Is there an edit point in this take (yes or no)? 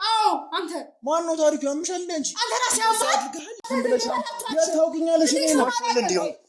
yes